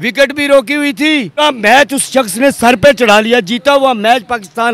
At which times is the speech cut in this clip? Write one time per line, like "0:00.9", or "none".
0:01.4